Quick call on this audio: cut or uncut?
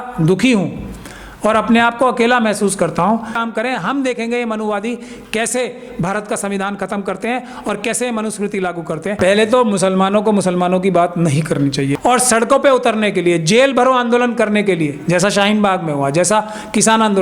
cut